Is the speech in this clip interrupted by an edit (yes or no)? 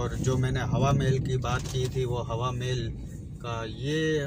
no